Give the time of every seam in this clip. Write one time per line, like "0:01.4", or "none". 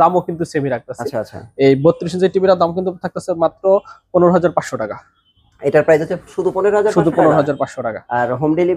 none